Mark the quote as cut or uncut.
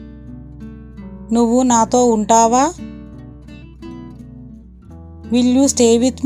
cut